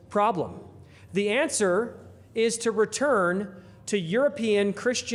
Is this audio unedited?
yes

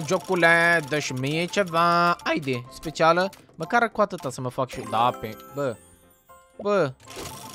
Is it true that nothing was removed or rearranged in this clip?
yes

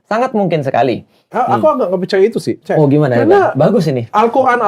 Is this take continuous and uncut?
no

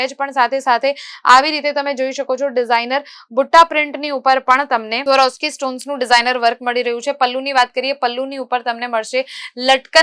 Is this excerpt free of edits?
yes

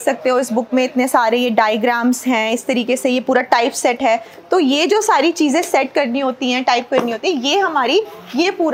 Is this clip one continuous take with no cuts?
yes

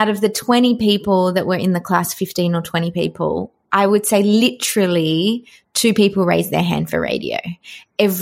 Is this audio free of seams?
yes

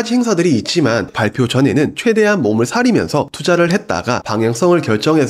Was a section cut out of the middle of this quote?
yes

